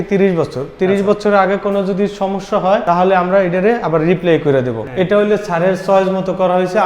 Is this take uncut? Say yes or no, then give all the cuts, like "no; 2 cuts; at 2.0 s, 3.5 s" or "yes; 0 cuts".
no; 2 cuts; at 2.8 s, 4.8 s